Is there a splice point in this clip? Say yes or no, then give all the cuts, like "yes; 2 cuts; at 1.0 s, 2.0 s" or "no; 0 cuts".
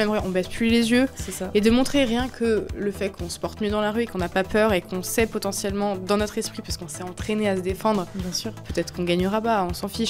no; 0 cuts